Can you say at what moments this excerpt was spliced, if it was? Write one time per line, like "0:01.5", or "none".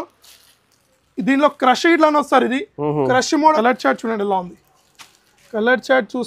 0:03.5